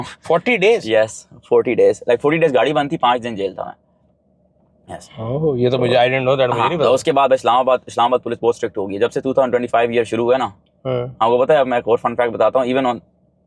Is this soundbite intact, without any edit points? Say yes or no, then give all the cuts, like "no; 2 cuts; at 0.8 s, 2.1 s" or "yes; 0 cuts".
yes; 0 cuts